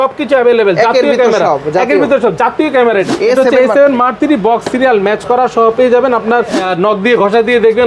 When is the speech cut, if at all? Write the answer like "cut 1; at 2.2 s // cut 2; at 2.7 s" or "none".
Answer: cut 1; at 3.1 s // cut 2; at 6.6 s